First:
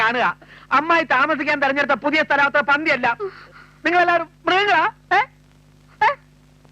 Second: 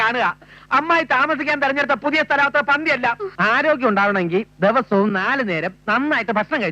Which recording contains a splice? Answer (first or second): second